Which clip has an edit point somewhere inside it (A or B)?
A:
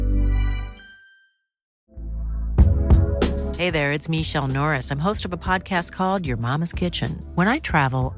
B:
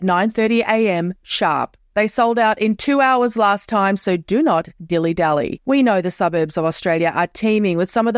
A